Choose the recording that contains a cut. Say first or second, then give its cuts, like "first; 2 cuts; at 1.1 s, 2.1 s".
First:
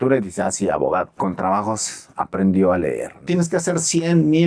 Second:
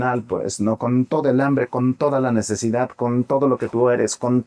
first; 2 cuts; at 1.1 s, 3.2 s